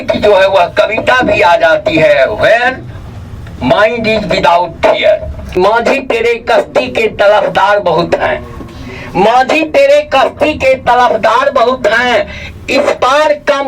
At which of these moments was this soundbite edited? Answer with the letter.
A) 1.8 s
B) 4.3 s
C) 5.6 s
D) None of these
C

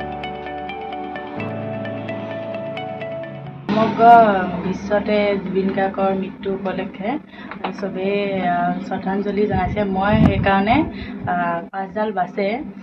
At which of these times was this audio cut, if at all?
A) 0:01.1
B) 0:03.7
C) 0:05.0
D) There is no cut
B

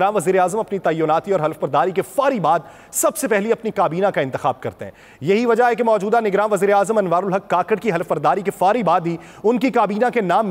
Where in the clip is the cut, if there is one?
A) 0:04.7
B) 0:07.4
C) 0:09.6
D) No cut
D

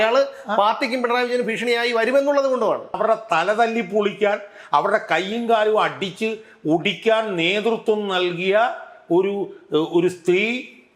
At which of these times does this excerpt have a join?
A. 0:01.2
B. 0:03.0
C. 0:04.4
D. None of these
B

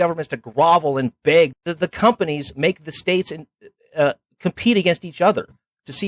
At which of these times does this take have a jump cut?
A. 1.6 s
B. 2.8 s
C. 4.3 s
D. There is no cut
A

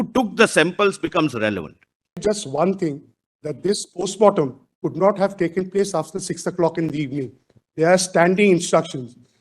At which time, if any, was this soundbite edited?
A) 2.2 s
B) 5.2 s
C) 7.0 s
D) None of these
A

